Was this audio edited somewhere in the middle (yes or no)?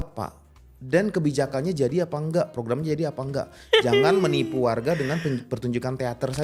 no